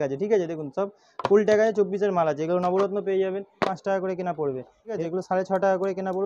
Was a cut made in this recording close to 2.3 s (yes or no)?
no